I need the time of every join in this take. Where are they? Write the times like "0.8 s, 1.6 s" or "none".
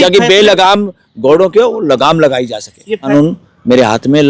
3.0 s